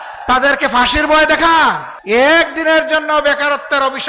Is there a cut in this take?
yes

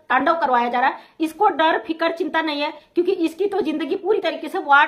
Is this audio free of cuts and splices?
yes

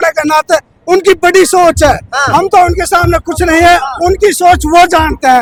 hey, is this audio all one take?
yes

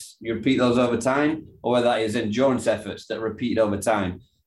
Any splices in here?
no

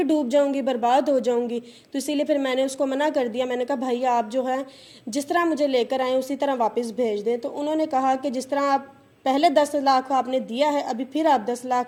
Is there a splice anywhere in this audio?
no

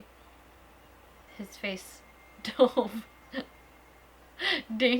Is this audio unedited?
no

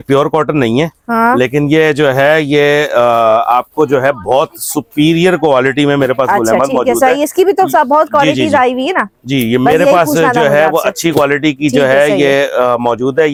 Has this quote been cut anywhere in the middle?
no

